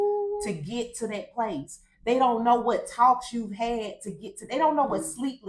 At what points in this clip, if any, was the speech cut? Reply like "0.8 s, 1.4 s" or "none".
none